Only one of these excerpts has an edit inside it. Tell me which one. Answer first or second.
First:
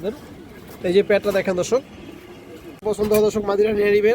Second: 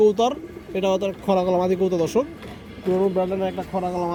first